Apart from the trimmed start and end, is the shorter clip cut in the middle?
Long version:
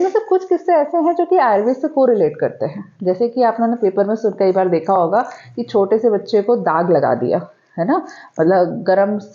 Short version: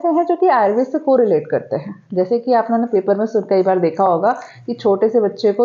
no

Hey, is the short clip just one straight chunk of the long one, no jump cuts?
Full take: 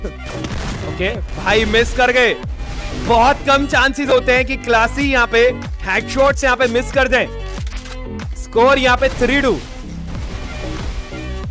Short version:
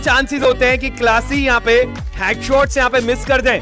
yes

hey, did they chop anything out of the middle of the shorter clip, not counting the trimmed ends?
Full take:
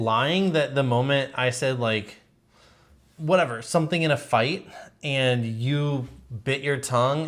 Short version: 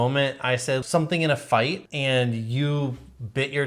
yes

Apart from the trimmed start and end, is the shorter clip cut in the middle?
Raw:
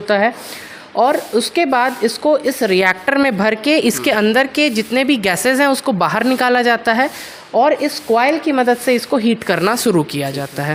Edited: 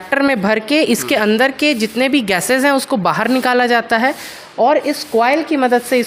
no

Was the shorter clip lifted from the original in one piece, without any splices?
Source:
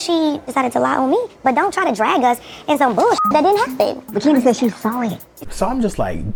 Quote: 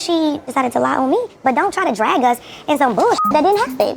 yes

